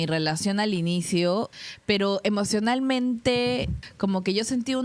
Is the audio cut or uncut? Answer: cut